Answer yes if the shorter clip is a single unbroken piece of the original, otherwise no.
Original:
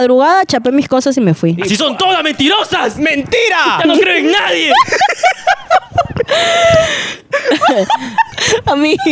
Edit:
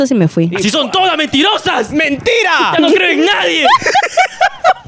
yes